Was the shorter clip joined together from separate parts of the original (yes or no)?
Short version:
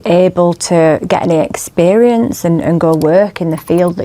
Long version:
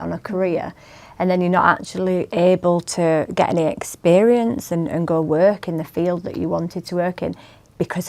no